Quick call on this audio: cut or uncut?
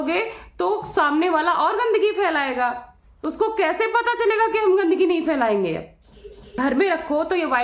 cut